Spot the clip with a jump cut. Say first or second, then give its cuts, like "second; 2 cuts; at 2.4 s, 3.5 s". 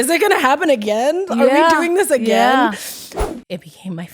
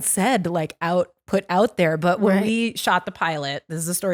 first; 1 cut; at 3.2 s